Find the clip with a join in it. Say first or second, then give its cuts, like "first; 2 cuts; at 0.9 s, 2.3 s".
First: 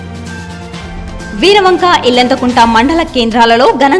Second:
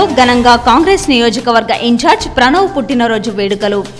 first; 1 cut; at 0.9 s